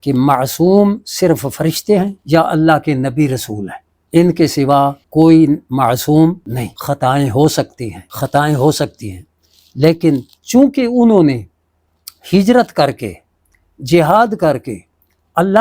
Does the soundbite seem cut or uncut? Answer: uncut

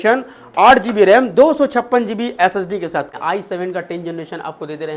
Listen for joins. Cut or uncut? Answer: cut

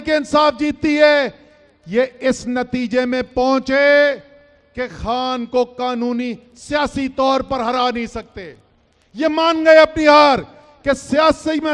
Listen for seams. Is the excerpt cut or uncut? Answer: uncut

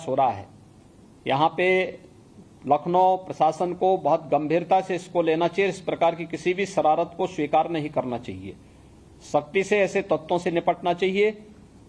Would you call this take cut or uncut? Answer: uncut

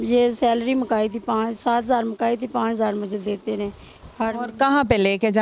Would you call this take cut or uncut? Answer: uncut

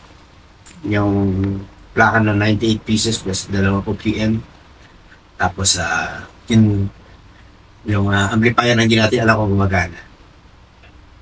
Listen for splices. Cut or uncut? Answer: uncut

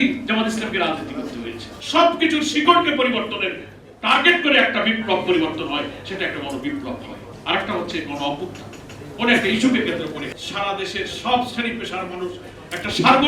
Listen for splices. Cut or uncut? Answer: cut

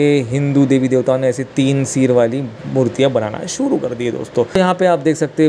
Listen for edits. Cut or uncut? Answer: uncut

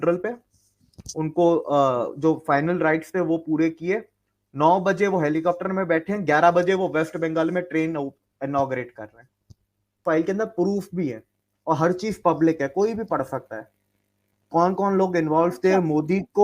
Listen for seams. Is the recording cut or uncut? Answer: cut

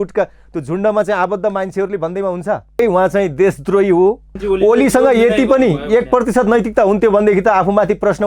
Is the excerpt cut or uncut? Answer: cut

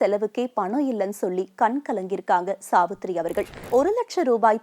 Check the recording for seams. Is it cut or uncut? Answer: cut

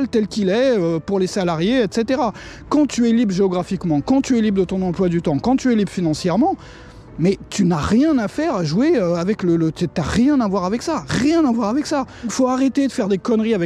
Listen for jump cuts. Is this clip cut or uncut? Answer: cut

